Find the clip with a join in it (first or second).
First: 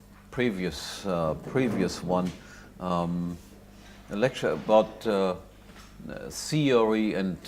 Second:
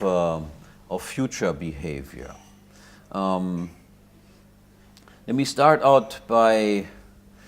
second